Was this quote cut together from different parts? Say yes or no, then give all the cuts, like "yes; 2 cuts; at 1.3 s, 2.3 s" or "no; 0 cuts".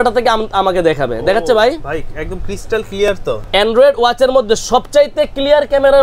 no; 0 cuts